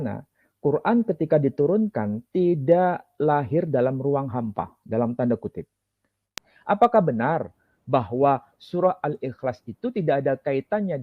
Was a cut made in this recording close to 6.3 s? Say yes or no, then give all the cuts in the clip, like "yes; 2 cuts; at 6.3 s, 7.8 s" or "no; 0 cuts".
yes; 1 cut; at 6.3 s